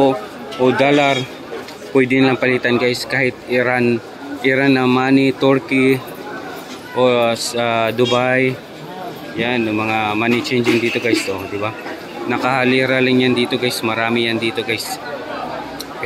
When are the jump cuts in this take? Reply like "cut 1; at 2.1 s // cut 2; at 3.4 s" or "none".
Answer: none